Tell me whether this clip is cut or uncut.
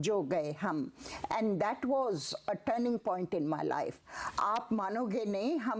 cut